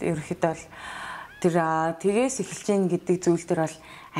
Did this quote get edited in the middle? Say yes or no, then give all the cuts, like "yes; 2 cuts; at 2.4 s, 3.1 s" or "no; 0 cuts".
no; 0 cuts